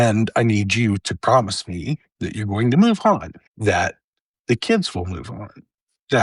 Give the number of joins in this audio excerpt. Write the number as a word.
zero